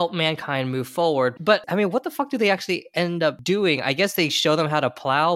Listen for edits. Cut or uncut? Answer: cut